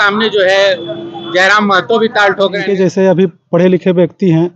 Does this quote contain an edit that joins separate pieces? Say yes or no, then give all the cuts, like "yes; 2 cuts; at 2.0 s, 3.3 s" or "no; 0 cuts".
yes; 1 cut; at 2.7 s